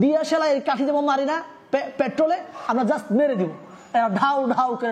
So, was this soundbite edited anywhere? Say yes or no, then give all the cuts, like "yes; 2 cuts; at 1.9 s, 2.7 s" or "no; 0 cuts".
no; 0 cuts